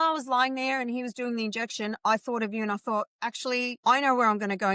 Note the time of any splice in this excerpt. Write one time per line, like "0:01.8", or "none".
none